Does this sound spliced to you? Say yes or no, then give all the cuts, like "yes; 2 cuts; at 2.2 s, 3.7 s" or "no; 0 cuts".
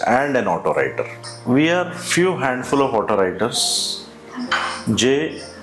yes; 1 cut; at 1.1 s